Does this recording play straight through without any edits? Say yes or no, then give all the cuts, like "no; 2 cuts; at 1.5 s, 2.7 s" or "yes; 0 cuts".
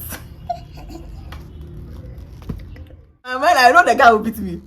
no; 2 cuts; at 1.4 s, 3.4 s